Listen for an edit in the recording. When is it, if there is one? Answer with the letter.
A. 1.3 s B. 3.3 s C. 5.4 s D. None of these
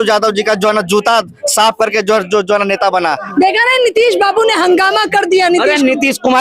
B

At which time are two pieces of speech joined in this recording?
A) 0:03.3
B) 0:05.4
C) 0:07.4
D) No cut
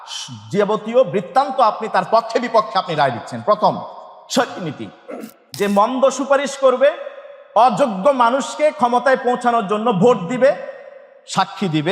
B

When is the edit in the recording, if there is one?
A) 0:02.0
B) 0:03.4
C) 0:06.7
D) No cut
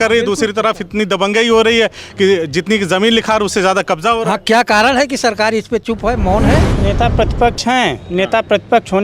C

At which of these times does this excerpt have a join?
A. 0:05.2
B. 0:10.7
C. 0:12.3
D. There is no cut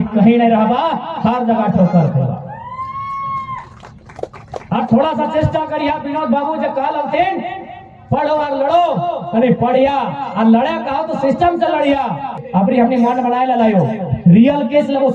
C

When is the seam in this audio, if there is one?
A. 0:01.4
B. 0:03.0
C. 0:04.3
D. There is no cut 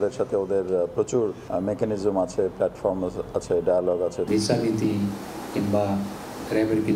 C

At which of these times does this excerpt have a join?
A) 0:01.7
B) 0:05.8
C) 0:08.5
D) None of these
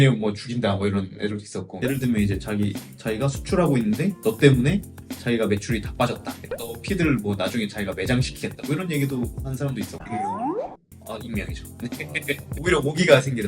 A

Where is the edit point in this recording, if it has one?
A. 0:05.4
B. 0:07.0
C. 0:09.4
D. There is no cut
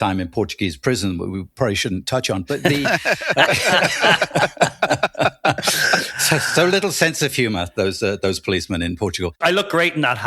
C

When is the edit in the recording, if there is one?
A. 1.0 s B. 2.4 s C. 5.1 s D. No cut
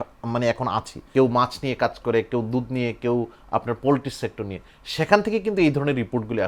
A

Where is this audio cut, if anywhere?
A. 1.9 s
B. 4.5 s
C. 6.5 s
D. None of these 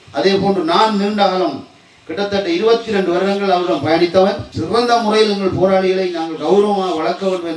B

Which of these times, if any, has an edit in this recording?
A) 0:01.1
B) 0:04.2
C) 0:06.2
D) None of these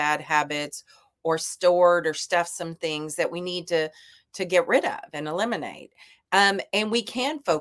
D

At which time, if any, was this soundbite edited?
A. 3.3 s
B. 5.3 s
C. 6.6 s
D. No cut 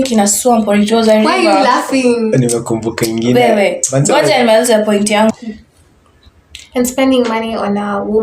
B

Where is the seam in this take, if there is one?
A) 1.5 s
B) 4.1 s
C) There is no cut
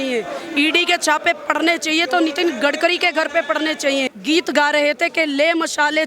B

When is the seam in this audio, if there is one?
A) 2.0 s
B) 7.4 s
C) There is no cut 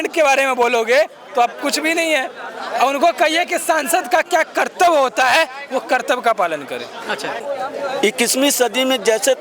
B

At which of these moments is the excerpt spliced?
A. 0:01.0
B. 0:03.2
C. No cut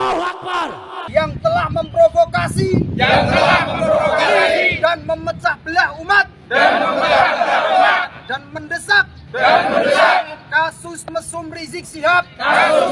A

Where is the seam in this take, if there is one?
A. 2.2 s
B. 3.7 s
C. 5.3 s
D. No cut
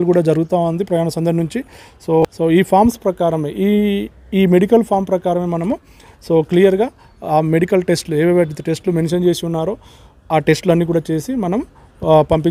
A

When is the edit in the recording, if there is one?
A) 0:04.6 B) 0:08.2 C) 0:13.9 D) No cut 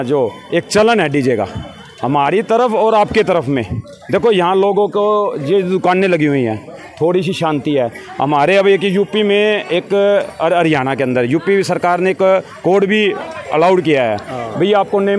D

